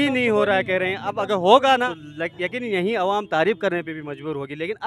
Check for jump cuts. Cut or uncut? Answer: cut